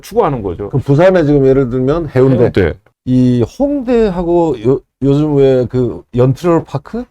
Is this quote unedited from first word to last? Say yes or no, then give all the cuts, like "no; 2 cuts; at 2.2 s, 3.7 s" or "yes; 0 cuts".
no; 1 cut; at 2.8 s